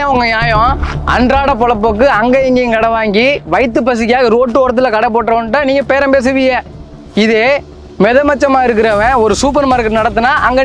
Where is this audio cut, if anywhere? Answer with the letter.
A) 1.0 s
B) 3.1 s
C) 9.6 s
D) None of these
D